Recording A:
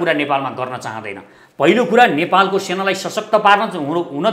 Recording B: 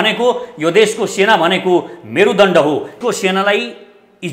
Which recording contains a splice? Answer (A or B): B